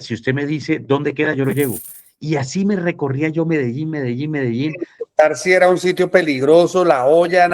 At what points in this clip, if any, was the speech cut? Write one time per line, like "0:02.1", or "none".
none